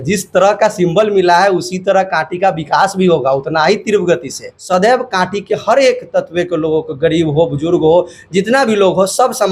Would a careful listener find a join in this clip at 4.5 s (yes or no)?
yes